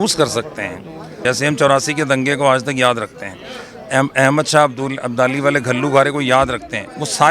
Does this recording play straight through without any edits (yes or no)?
no